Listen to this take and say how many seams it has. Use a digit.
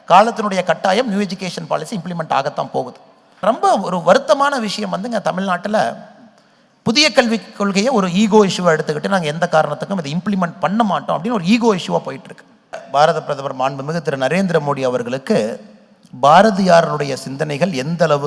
2